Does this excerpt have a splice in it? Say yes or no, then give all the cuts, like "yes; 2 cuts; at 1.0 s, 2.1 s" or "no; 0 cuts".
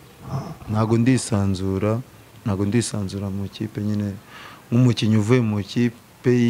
no; 0 cuts